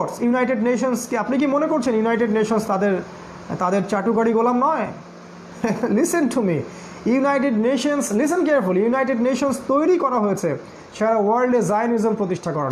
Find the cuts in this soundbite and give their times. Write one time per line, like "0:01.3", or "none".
none